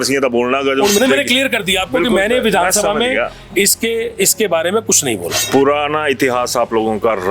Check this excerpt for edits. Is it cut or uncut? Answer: cut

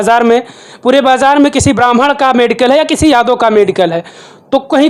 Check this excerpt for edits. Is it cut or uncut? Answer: uncut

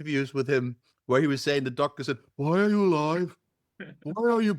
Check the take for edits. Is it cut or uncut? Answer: uncut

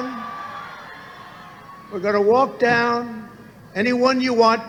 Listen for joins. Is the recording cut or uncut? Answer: uncut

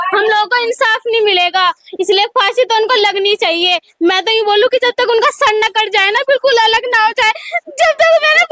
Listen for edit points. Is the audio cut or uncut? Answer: uncut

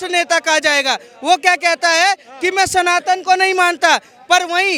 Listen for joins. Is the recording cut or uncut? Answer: uncut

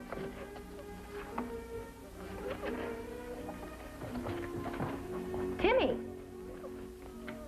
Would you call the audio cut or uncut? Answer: cut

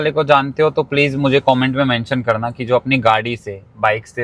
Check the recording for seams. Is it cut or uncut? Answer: uncut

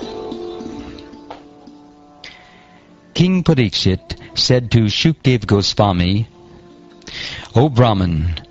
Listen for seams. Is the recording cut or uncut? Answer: cut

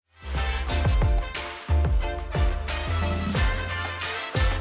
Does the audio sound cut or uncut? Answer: uncut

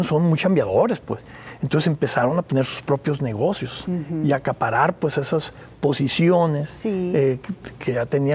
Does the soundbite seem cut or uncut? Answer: uncut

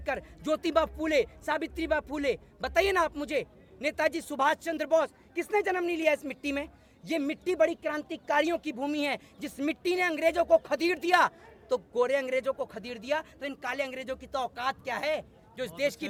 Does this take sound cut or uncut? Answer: uncut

